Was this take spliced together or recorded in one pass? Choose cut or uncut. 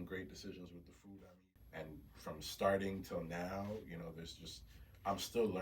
cut